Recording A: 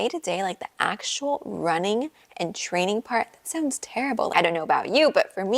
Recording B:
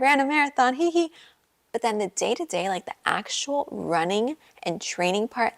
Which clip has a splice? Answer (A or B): A